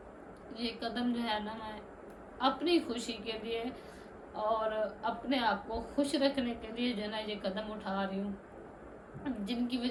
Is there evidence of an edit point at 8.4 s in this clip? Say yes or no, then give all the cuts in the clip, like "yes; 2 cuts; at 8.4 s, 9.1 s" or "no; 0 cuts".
no; 0 cuts